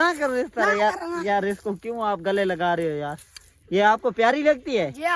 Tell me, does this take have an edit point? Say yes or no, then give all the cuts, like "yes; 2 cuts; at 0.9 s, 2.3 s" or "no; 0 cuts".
no; 0 cuts